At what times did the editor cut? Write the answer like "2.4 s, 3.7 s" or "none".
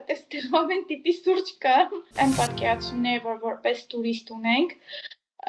2.0 s